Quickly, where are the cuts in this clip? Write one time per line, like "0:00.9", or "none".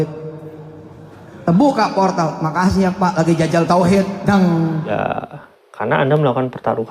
0:04.9